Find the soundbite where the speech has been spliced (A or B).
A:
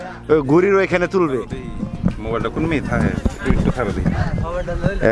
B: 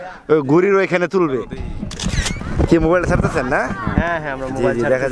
B